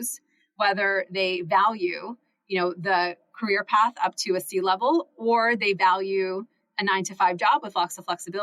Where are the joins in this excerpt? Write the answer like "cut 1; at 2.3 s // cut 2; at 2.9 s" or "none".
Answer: none